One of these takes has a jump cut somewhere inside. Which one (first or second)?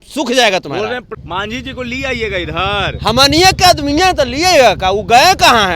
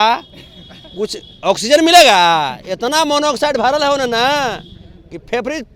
first